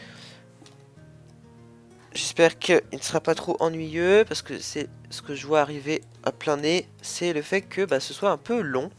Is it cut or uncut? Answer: uncut